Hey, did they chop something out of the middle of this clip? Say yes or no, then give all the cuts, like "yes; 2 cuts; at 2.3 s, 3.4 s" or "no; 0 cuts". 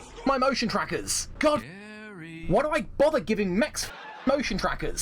no; 0 cuts